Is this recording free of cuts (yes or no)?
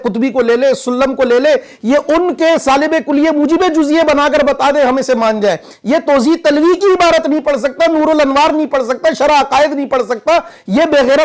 yes